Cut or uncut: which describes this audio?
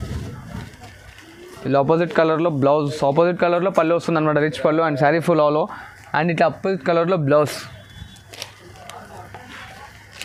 uncut